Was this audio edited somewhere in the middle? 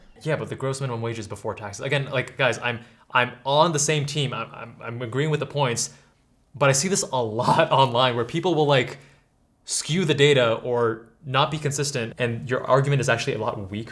yes; 1 cut; at 12.1 s

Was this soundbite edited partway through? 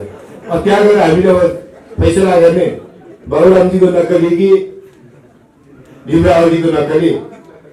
no; 0 cuts

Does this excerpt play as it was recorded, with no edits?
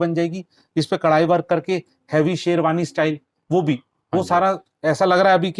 yes; 0 cuts

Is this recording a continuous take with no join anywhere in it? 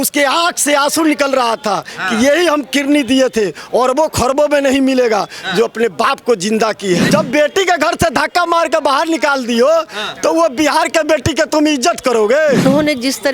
no; 2 cuts; at 7.1 s, 12.6 s

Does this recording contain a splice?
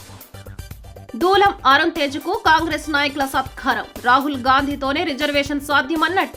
no; 0 cuts

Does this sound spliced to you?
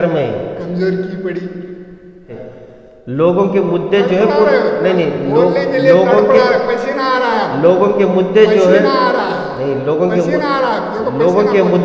yes; 1 cut; at 2.3 s

